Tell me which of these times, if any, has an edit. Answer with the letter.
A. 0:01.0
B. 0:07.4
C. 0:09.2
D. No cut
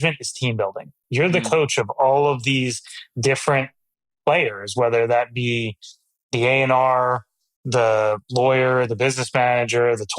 A